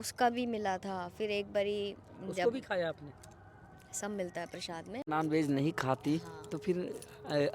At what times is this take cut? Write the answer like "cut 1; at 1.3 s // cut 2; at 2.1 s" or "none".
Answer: cut 1; at 5.0 s

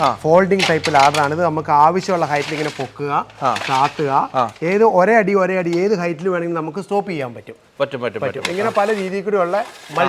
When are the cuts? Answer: none

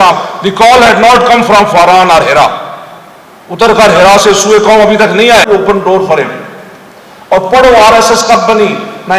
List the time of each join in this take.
cut 1; at 5.5 s

